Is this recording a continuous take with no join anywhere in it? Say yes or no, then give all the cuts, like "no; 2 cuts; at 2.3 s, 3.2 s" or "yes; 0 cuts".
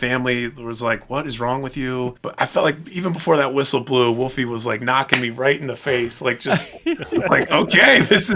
no; 1 cut; at 2.2 s